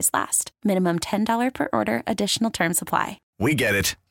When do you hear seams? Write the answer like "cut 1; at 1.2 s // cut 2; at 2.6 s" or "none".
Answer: cut 1; at 3.2 s